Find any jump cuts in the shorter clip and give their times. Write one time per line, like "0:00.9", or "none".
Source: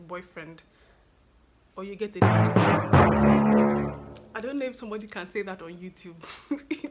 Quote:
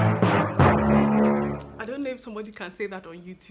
0:01.7